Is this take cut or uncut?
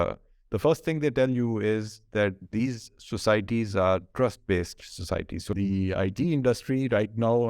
cut